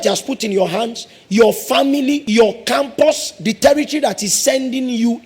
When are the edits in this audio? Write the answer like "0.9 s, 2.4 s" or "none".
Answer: 2.2 s